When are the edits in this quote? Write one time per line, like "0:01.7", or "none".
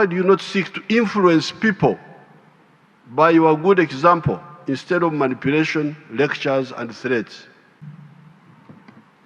0:07.8